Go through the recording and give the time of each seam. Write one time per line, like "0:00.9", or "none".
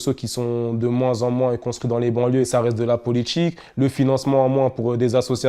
0:02.5